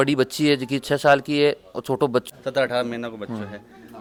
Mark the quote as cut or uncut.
uncut